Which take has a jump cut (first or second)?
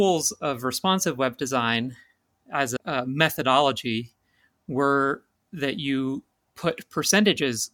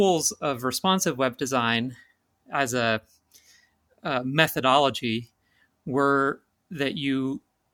first